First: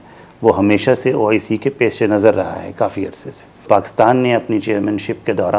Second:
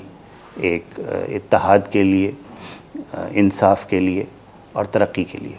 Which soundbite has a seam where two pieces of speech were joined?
first; 1 cut; at 3.7 s

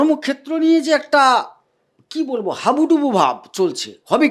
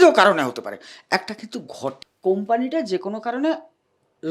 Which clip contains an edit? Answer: second; 1 cut; at 2.1 s

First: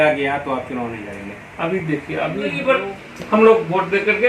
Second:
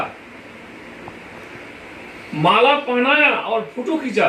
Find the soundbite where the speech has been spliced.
first; 1 cut; at 2.6 s

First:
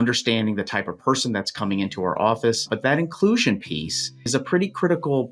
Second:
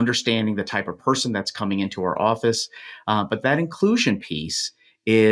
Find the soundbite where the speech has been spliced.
first; 2 cuts; at 2.7 s, 4.2 s

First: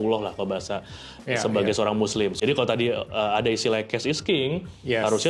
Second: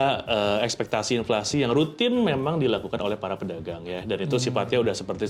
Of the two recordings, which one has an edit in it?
first; 1 cut; at 2.4 s

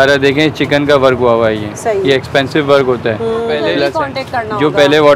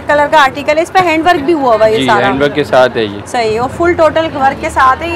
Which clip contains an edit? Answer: first; 1 cut; at 3.8 s

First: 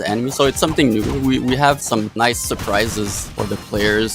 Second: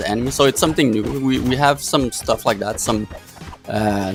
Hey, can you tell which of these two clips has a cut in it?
first; 2 cuts; at 1.9 s, 3.2 s

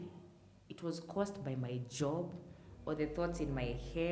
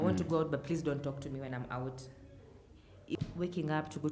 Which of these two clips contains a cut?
second; 1 cut; at 3.2 s

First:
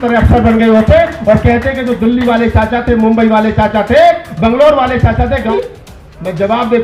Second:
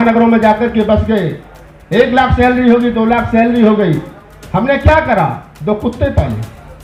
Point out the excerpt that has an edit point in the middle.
first; 1 cut; at 5.5 s

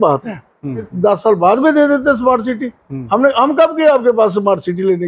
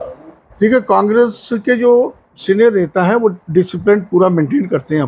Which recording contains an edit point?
first; 1 cut; at 0.9 s

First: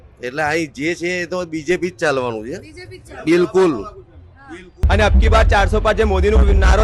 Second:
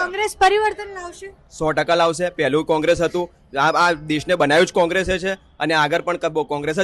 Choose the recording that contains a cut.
first; 1 cut; at 4.7 s

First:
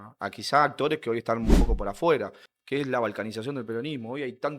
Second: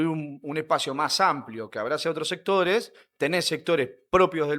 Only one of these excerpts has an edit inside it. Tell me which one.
first; 1 cut; at 2.4 s

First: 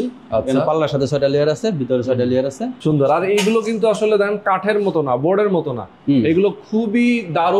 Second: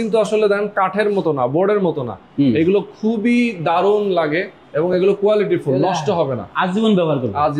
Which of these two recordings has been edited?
first; 1 cut; at 2.7 s

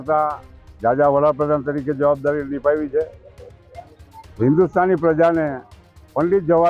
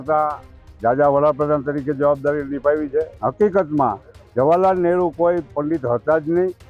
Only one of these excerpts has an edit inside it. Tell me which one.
second; 1 cut; at 3.1 s

